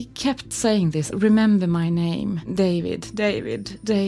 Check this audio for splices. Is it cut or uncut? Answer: cut